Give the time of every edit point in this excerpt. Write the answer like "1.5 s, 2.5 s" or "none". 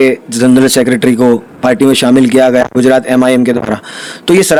none